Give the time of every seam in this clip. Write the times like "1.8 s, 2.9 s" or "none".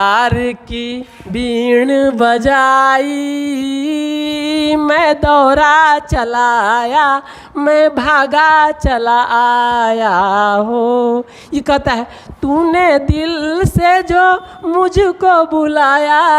none